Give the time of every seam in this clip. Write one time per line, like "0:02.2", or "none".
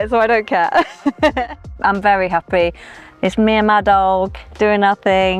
0:01.7